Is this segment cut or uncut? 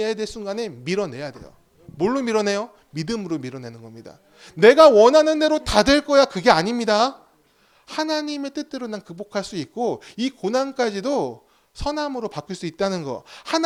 uncut